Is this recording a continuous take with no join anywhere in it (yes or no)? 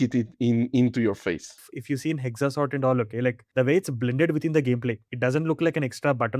no